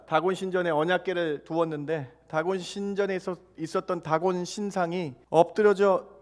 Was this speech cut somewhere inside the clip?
yes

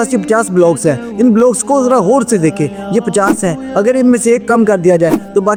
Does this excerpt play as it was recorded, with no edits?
yes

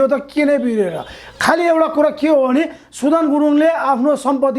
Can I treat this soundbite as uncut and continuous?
yes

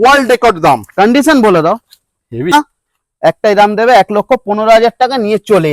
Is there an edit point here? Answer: yes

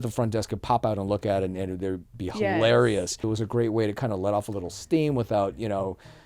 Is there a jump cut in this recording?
yes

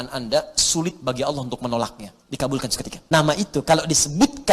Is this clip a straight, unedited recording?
no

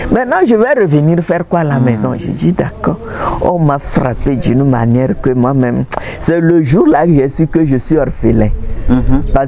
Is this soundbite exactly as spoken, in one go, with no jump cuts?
yes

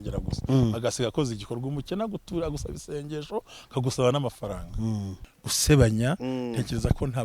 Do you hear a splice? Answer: yes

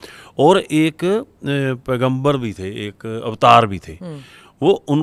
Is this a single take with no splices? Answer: yes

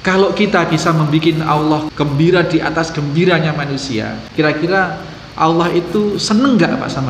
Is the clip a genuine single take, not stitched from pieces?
no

